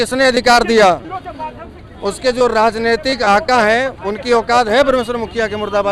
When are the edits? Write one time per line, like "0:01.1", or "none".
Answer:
none